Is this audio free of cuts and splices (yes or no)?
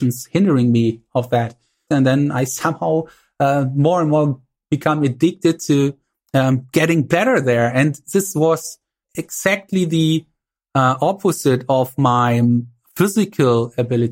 no